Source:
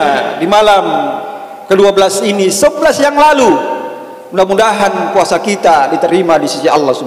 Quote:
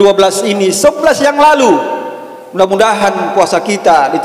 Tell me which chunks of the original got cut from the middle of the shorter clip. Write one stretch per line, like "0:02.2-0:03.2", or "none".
none